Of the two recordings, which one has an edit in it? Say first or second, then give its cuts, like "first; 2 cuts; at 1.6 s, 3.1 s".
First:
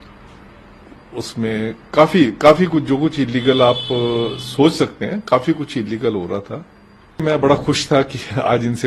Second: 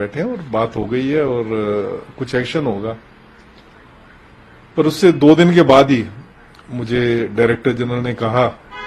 first; 1 cut; at 7.2 s